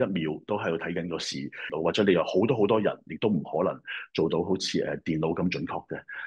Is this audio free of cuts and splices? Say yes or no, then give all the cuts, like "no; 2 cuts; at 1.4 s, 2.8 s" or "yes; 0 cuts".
no; 1 cut; at 1.7 s